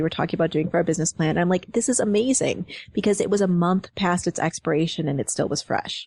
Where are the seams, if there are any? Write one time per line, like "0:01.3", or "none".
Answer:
none